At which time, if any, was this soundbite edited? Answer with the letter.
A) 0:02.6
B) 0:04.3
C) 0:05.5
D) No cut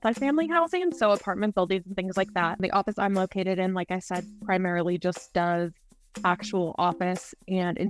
A